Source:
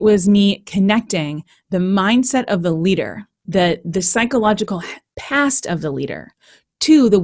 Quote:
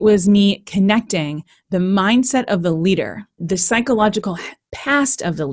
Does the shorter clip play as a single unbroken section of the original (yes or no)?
no